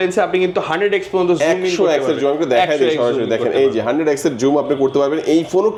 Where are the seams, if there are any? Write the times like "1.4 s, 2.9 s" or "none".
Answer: none